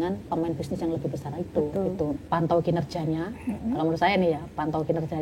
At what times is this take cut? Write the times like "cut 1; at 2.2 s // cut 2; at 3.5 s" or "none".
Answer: cut 1; at 2.2 s